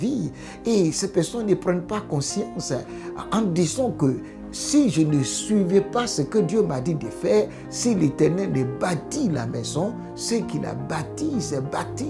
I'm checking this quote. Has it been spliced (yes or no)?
no